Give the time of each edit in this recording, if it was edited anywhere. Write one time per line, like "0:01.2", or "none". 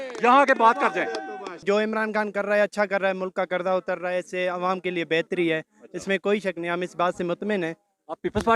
0:01.6